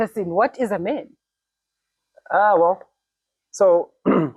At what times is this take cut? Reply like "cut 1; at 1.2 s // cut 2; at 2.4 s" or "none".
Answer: none